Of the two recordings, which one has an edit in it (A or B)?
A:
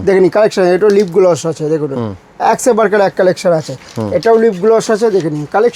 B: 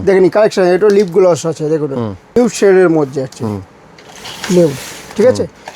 B